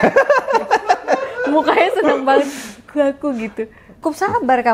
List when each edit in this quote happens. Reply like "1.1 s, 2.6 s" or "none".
3.8 s